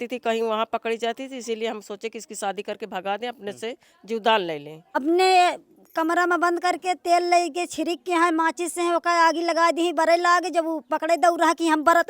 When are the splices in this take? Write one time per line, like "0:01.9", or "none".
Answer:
0:04.8

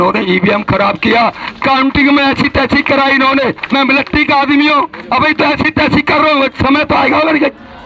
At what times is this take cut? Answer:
none

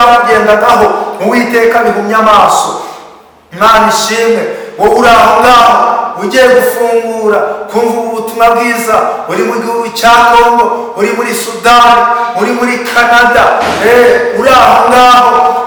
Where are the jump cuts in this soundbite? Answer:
none

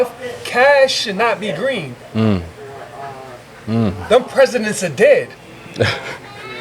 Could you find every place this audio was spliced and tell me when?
none

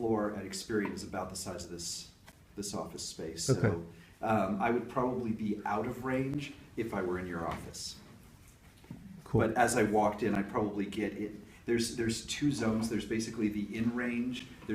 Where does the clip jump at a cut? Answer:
0:08.2

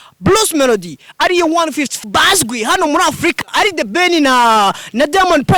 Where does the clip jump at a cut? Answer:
0:01.9

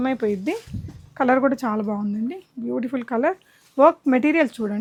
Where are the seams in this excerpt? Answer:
none

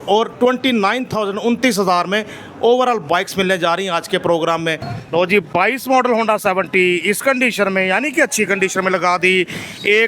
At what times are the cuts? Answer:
0:04.9

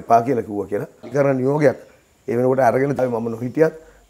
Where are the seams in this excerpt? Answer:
0:01.1
0:03.0

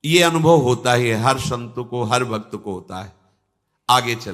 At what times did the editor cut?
none

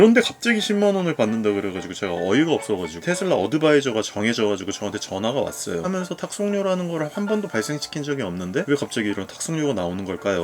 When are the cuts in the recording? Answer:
0:02.9
0:05.9

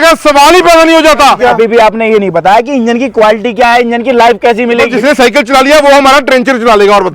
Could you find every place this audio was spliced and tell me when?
0:01.4
0:04.9

